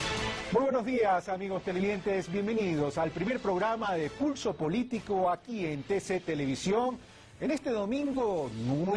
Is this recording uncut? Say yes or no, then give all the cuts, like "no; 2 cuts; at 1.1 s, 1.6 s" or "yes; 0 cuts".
no; 1 cut; at 1.8 s